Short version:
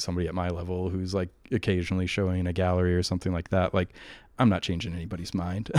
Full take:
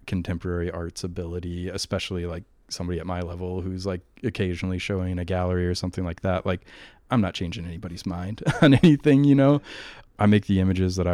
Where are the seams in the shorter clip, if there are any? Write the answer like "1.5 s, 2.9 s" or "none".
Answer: none